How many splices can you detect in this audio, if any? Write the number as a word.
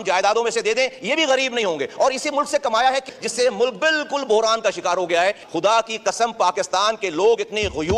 two